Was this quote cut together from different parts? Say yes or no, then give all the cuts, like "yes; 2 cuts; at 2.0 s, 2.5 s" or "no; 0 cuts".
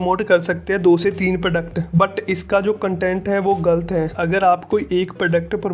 yes; 1 cut; at 4.2 s